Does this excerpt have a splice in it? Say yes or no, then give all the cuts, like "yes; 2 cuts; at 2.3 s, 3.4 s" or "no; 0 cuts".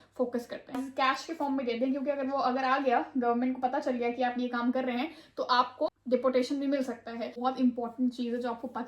yes; 3 cuts; at 0.8 s, 5.9 s, 7.3 s